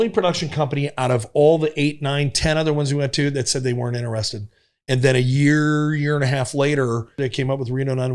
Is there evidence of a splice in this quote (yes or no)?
yes